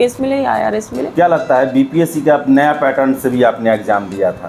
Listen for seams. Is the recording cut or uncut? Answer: cut